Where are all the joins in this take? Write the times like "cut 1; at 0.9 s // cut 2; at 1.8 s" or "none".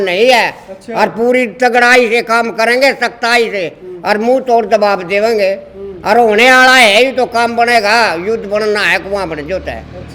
none